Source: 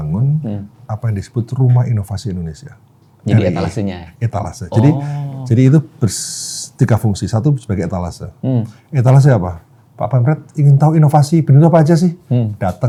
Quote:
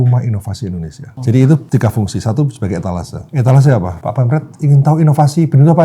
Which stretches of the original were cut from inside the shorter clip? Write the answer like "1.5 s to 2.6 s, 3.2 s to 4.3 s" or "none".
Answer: 2.7 s to 5.3 s, 5.9 s to 6.7 s, 8.3 s to 8.8 s, 9.5 s to 9.9 s